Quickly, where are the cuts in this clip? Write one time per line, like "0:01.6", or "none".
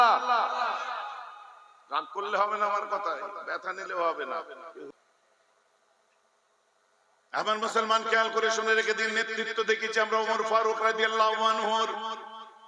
0:04.9